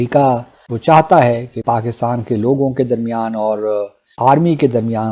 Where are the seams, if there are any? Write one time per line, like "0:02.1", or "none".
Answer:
0:01.6